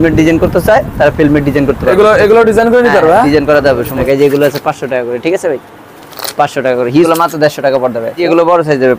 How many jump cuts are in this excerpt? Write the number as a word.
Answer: three